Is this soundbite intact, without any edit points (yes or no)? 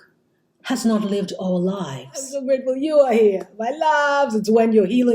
no